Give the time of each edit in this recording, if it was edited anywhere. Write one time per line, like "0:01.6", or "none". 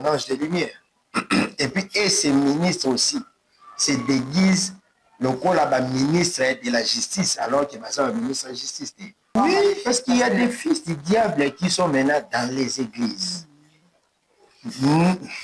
0:09.3